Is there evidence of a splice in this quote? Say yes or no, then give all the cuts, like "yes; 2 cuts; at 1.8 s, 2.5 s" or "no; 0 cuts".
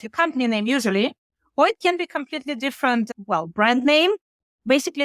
no; 0 cuts